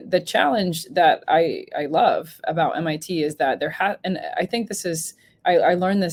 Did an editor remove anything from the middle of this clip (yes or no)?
no